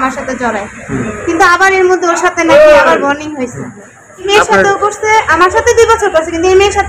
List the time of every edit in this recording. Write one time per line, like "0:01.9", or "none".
0:04.3